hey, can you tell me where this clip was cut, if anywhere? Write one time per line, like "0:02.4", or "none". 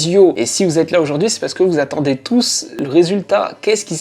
0:02.7